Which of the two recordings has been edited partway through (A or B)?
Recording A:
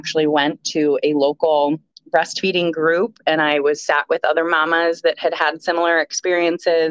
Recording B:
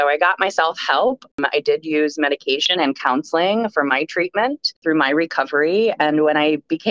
B